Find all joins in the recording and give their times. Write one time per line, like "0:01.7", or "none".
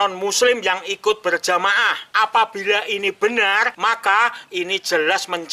none